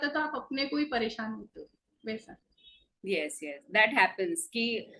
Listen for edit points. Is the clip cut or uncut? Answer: uncut